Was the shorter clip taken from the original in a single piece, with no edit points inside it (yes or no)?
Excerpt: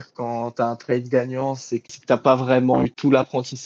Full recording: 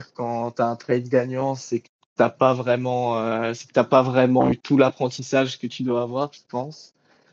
no